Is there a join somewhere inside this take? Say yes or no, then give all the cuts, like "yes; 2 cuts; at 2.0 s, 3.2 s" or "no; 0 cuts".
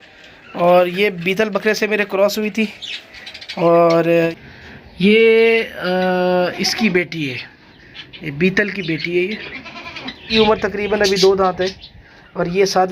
yes; 2 cuts; at 4.4 s, 10.2 s